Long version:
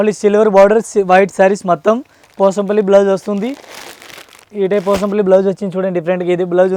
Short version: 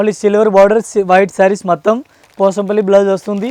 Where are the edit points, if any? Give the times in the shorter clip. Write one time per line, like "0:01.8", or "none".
none